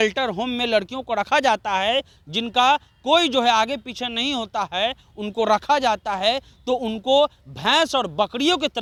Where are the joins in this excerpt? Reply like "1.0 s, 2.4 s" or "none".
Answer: none